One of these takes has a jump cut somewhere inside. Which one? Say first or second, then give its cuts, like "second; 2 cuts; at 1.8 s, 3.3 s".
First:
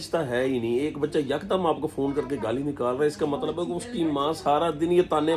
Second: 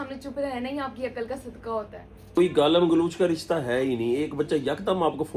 second; 1 cut; at 2.4 s